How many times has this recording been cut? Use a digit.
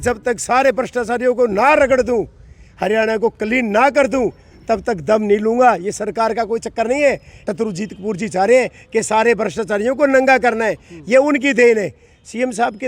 1